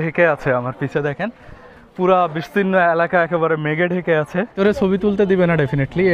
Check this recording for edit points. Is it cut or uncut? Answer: cut